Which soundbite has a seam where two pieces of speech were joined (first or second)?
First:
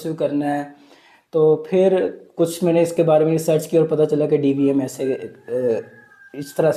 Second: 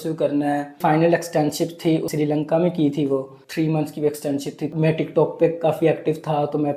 second